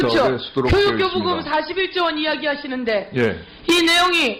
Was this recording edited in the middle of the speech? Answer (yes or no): no